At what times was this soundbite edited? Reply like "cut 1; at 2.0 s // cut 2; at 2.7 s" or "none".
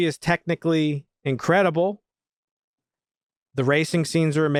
none